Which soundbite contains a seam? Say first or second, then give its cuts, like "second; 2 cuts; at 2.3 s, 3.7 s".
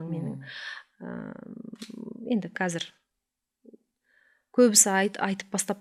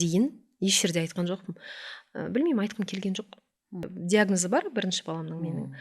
second; 1 cut; at 3.9 s